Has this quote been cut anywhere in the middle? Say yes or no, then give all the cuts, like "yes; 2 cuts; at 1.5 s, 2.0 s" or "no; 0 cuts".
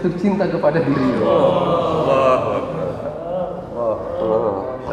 no; 0 cuts